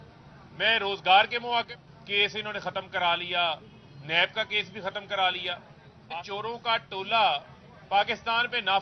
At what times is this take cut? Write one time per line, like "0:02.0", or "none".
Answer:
0:01.7
0:06.1